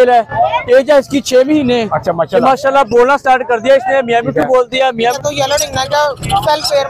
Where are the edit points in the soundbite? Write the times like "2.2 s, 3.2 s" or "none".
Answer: 5.2 s